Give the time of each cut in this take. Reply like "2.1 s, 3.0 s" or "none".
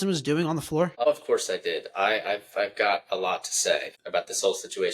1.0 s, 4.0 s